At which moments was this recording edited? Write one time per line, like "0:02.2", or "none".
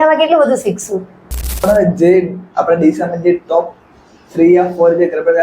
0:01.6